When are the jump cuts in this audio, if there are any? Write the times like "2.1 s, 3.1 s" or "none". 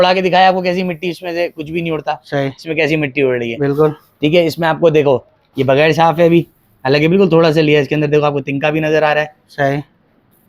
none